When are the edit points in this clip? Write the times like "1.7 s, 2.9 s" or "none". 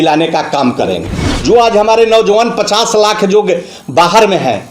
1.1 s